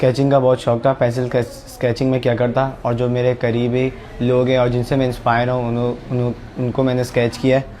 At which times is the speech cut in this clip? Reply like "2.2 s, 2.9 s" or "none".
none

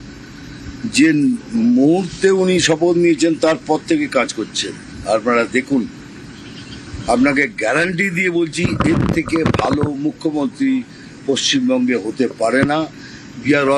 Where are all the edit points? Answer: none

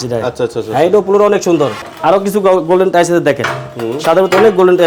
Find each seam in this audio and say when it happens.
1.9 s

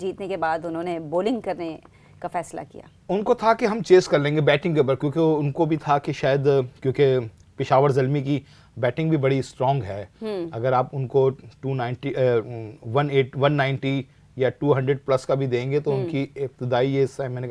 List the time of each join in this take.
2.9 s

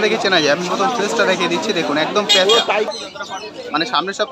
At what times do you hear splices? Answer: 2.9 s

